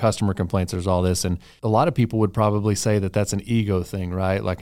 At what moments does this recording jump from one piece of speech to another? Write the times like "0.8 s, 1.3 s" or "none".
1.5 s